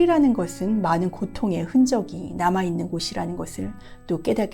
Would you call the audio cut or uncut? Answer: uncut